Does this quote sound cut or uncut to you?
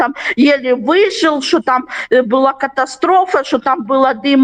uncut